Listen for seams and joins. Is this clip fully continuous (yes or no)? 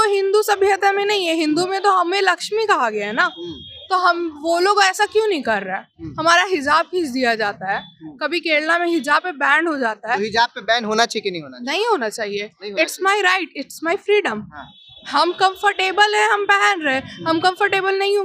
yes